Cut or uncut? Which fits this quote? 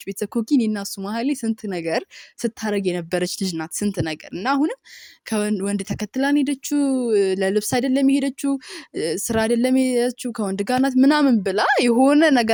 uncut